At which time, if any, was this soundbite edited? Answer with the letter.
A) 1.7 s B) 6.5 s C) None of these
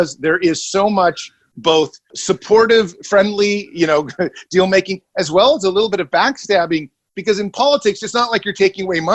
A